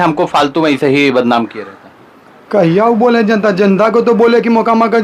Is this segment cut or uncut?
uncut